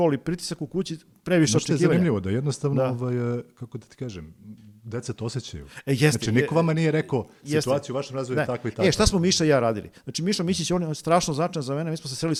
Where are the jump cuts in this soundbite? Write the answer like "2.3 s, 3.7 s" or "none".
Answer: none